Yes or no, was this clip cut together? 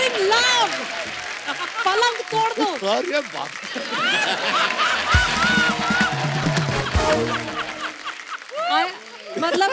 no